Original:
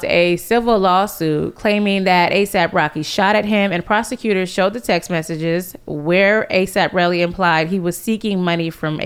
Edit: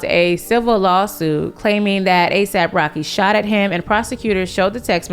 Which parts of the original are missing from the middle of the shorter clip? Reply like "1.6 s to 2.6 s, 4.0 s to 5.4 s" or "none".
none